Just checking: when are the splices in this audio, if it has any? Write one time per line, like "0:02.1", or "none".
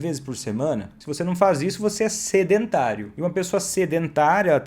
0:01.0
0:03.1